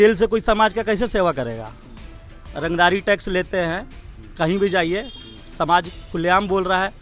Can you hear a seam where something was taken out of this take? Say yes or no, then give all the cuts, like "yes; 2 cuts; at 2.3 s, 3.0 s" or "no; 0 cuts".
no; 0 cuts